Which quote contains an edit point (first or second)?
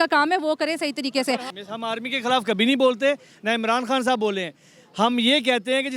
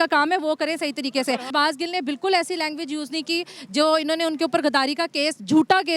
second